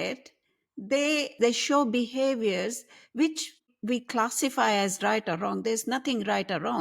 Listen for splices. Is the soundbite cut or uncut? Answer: cut